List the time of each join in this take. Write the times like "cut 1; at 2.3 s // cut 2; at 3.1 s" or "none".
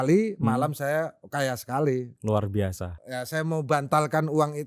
cut 1; at 2.9 s

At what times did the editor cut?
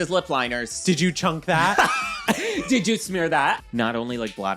cut 1; at 0.8 s // cut 2; at 3.6 s

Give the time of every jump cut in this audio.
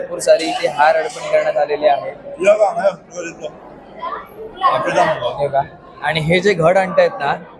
none

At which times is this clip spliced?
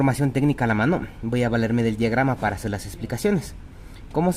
none

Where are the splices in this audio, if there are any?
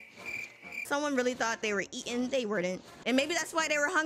cut 1; at 0.8 s // cut 2; at 2.9 s

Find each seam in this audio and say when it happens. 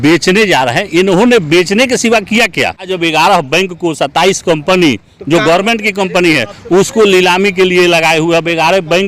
cut 1; at 2.9 s

